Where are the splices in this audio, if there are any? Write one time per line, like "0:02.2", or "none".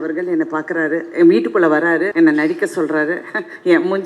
0:02.1